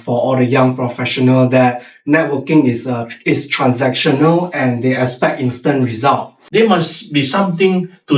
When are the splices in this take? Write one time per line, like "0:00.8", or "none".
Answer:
0:06.4